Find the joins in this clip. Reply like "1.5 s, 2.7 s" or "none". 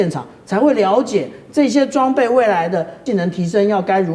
3.0 s